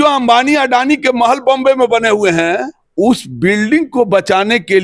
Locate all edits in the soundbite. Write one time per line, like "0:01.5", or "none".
0:02.8